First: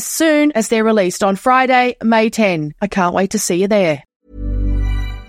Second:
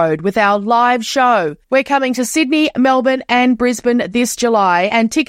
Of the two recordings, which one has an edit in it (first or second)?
first